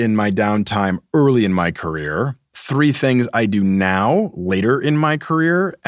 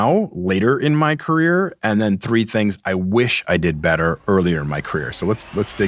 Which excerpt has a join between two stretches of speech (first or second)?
first